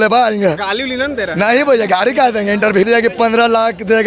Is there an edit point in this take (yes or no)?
yes